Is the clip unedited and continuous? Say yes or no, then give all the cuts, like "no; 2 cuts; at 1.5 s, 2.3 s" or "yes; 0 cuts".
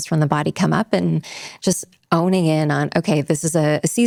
yes; 0 cuts